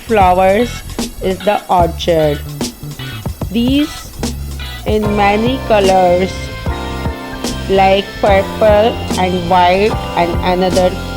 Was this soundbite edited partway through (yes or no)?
yes